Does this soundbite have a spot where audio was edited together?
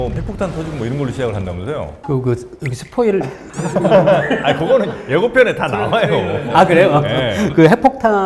no; 0 cuts

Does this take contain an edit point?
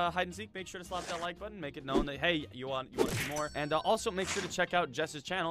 no; 0 cuts

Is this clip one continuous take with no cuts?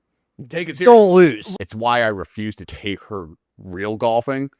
no; 2 cuts; at 1.4 s, 2.7 s

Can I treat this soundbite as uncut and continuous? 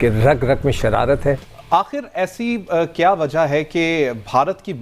no; 1 cut; at 1.5 s

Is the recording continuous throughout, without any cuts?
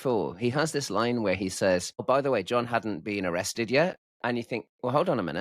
no; 2 cuts; at 2.0 s, 4.1 s

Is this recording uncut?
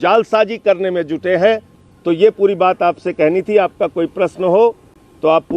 yes; 0 cuts

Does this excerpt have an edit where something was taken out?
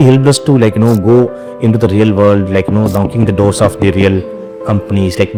no; 0 cuts

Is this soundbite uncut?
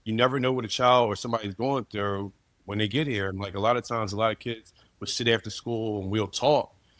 yes; 0 cuts

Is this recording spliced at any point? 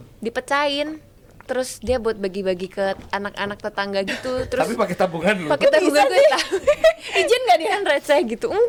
no; 0 cuts

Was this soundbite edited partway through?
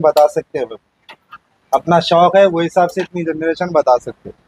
no; 0 cuts

